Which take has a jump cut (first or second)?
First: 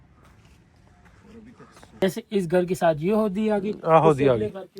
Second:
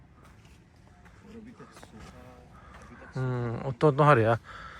first